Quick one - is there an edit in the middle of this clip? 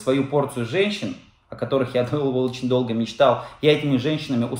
no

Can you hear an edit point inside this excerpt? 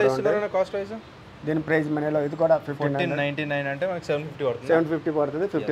no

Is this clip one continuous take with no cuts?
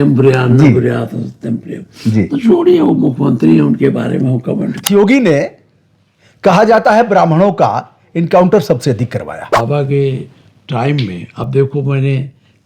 no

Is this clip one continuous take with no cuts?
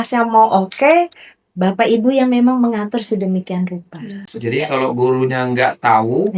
no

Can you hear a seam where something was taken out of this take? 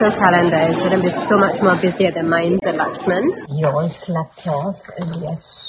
yes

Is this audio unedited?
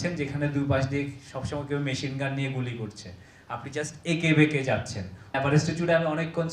no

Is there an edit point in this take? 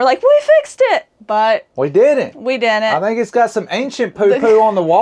no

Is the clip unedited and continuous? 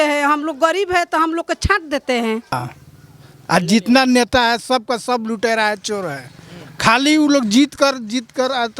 no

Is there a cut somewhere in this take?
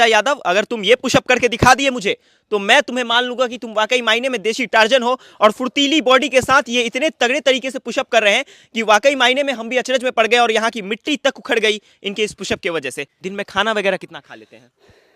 yes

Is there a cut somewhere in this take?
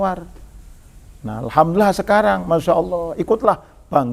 no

